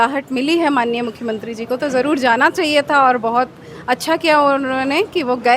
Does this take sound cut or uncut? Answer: uncut